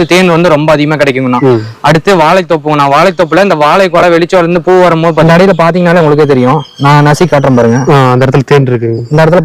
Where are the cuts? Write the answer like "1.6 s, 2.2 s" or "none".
5.2 s

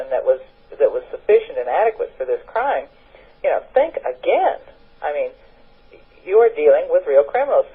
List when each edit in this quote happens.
5.2 s

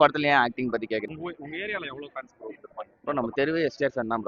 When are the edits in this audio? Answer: 1.1 s

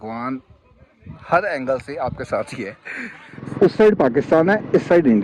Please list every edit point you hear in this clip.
3.4 s

